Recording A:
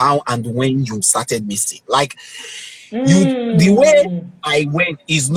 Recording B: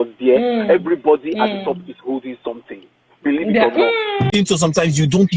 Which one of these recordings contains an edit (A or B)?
B